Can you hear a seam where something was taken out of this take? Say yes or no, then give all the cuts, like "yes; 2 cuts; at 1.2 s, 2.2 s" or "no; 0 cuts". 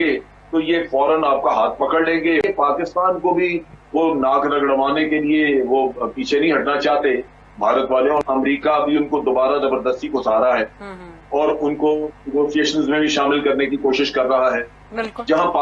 yes; 2 cuts; at 2.4 s, 8.2 s